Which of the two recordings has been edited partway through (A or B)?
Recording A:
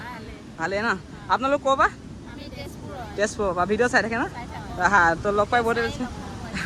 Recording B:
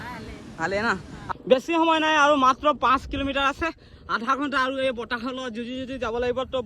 B